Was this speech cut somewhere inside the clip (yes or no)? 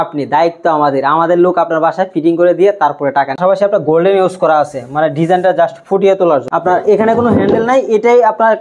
yes